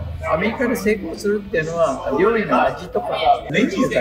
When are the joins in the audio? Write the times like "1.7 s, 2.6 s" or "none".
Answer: none